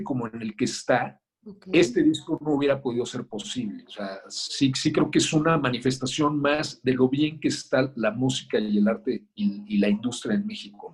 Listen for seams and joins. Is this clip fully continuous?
yes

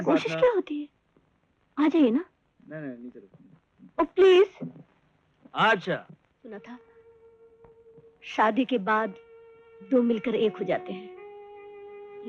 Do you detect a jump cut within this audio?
yes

